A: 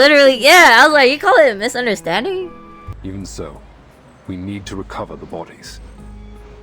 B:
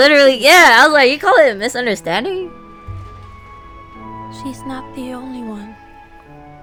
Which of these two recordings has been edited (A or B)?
A